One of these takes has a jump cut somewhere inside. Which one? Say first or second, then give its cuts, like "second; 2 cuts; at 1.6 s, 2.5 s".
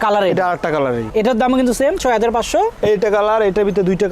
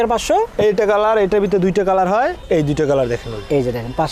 first; 1 cut; at 1.1 s